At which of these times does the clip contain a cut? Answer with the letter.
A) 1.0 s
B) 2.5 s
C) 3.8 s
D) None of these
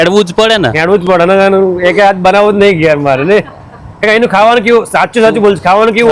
D